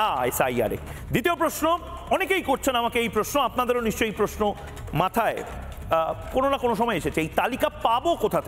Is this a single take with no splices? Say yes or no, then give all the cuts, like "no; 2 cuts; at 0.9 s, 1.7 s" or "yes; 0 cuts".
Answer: no; 1 cut; at 0.9 s